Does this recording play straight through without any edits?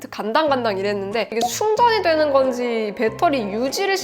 no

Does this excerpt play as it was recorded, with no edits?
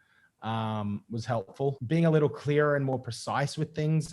no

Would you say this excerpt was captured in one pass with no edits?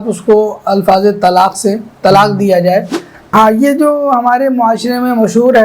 no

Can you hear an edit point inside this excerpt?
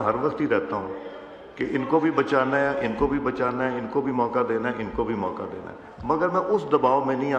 no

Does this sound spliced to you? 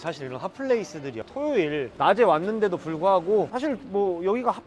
yes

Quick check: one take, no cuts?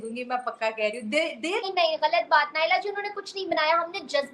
no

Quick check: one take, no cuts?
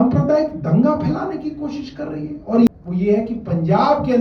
no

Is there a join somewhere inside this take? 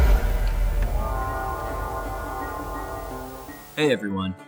no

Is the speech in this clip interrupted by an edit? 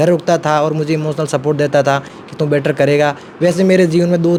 no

